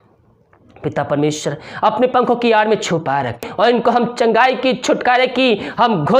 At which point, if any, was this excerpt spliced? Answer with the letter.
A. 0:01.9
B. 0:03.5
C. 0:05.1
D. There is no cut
B